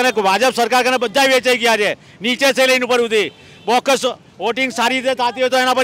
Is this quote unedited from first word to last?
yes; 0 cuts

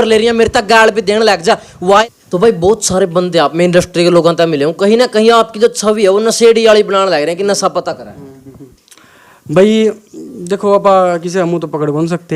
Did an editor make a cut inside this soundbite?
yes; 1 cut; at 2.0 s

